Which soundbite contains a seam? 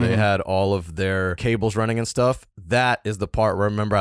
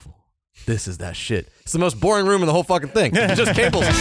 first; 1 cut; at 1.4 s

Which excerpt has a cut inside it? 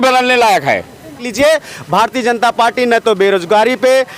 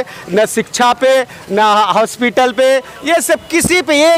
first; 1 cut; at 1.2 s

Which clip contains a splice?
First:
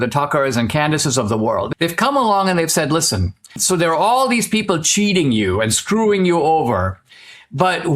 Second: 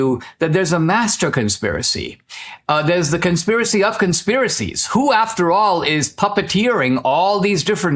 first; 2 cuts; at 1.7 s, 3.6 s

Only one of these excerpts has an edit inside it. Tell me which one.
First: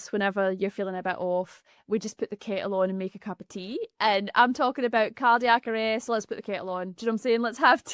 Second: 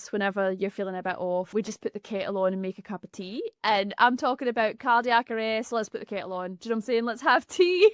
second; 1 cut; at 1.5 s

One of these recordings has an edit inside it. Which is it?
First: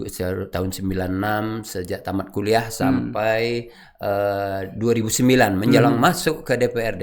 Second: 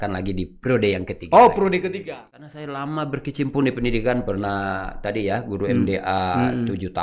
second; 1 cut; at 2.0 s

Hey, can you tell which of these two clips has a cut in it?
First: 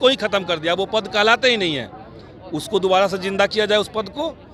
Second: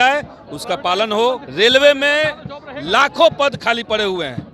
second; 1 cut; at 1.5 s

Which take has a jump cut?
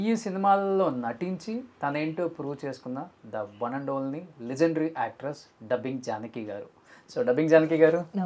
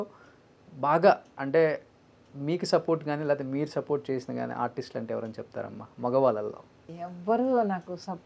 second; 1 cut; at 6.8 s

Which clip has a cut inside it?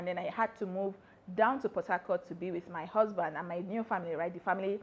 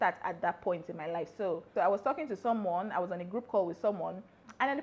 second; 1 cut; at 1.7 s

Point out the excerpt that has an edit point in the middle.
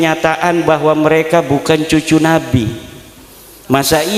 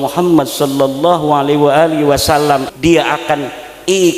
second; 1 cut; at 2.7 s

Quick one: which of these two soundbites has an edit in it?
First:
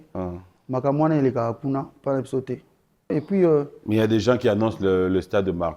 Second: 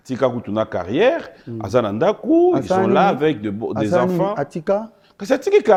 first; 1 cut; at 3.1 s

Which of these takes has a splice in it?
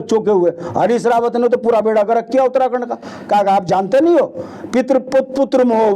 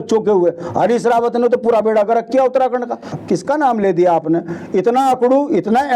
second; 1 cut; at 3.1 s

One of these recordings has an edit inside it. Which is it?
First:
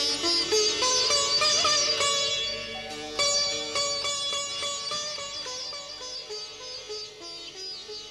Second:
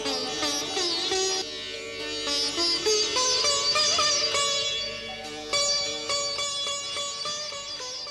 second; 1 cut; at 1.4 s

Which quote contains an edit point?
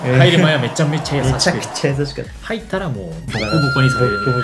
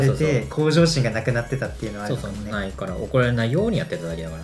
first; 1 cut; at 3.2 s

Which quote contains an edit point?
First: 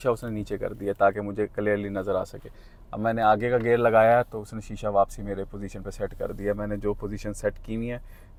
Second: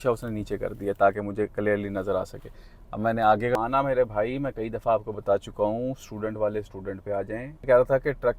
second; 2 cuts; at 3.6 s, 7.6 s

